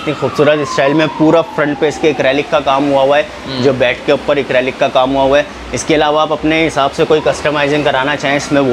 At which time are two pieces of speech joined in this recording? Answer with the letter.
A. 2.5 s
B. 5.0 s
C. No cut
C